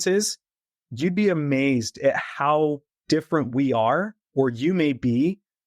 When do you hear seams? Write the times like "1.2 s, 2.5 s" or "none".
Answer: 2.9 s